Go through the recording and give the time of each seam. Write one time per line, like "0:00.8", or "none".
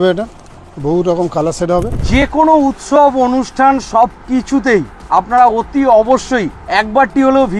0:02.0
0:05.0
0:06.6